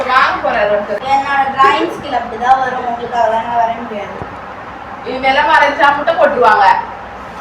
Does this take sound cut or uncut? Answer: cut